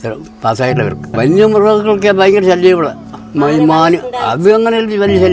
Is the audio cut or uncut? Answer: cut